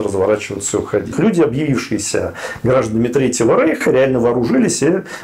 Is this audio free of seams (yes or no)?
no